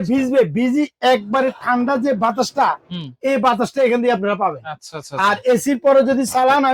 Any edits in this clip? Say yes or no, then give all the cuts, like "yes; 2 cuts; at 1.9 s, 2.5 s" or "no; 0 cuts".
no; 0 cuts